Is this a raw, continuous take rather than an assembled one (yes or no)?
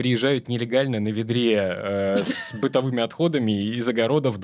yes